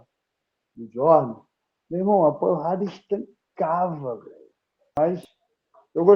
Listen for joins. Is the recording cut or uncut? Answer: cut